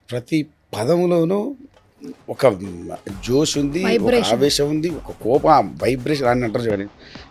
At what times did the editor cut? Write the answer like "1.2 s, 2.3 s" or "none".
none